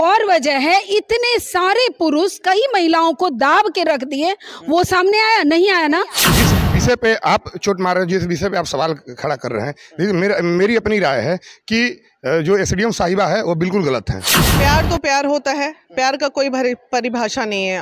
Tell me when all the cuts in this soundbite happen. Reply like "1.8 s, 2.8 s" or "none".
6.3 s, 14.5 s